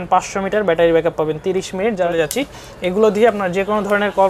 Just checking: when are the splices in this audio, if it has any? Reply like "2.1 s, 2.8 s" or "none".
2.1 s